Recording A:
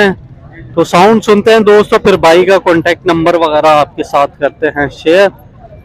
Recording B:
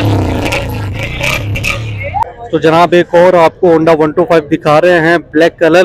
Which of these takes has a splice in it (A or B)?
B